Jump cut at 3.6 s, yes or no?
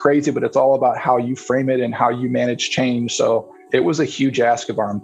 yes